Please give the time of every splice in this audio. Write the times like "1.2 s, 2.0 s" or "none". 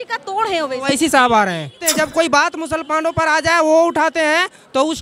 1.8 s